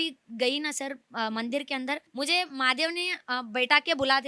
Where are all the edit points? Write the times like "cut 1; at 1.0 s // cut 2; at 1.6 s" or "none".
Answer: cut 1; at 2.1 s